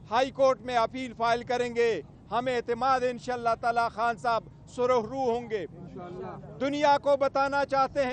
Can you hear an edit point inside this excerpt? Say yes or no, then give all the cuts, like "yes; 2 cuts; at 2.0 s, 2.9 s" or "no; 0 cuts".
no; 0 cuts